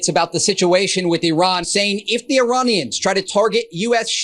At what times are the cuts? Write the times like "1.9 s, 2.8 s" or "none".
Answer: 1.7 s